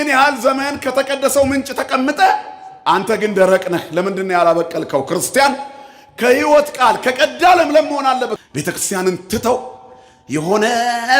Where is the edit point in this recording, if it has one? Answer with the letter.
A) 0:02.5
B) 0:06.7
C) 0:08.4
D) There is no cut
C